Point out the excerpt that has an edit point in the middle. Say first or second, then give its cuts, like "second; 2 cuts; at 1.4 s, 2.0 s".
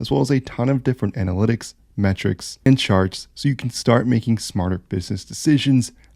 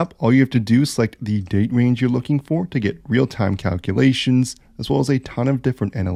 first; 1 cut; at 2.7 s